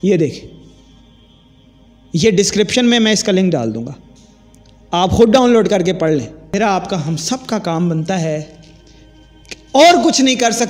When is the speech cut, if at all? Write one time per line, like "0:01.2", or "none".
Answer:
0:06.5